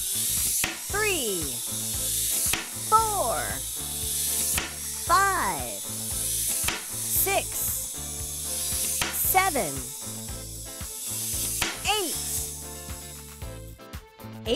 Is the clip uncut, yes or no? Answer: no